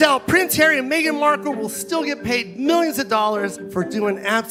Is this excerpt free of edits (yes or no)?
yes